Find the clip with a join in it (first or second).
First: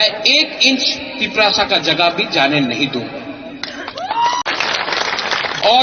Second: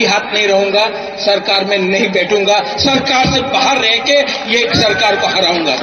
first